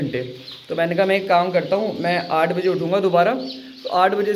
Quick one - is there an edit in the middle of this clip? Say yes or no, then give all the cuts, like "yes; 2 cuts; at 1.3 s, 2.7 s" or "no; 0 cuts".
no; 0 cuts